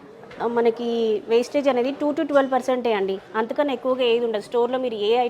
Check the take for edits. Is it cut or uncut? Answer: uncut